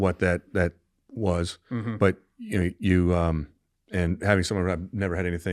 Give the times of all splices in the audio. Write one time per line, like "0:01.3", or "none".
none